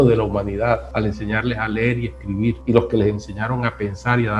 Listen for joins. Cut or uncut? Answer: cut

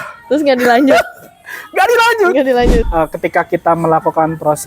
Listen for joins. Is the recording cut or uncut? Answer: cut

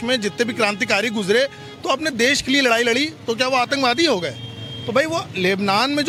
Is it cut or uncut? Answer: uncut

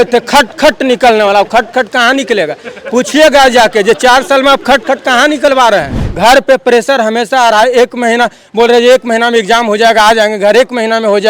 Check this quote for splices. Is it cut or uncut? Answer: cut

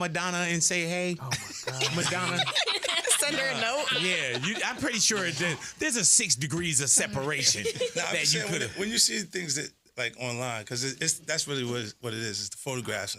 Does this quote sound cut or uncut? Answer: uncut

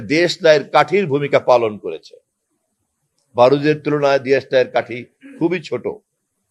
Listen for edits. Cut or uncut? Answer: uncut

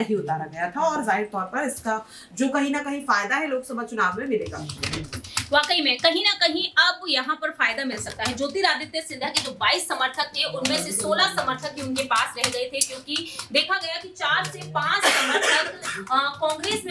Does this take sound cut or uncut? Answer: uncut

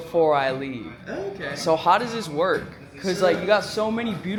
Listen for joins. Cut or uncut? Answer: uncut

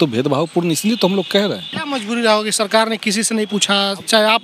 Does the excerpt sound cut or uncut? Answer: cut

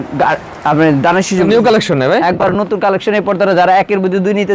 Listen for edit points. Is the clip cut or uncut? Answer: cut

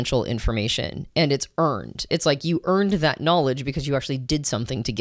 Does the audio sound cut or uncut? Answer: uncut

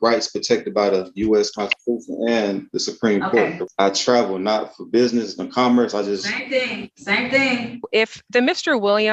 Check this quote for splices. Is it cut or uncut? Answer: cut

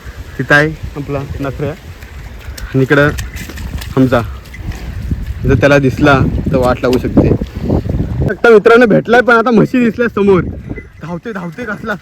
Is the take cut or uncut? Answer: cut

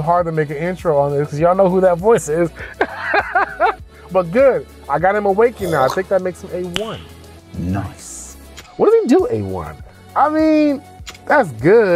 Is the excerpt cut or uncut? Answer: uncut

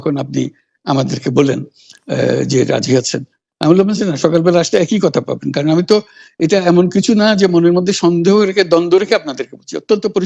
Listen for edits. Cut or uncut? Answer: uncut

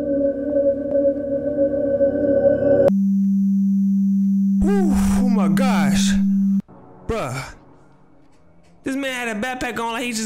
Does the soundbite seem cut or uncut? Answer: uncut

